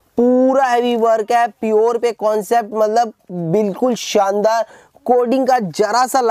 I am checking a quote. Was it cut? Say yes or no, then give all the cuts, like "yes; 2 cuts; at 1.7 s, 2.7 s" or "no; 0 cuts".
no; 0 cuts